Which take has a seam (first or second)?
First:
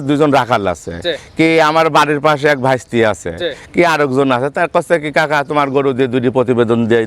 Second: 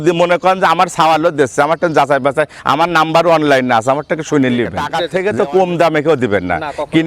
second